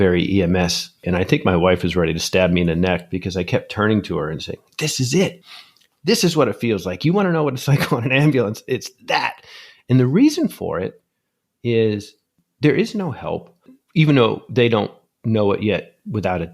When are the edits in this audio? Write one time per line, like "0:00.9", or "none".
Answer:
0:01.0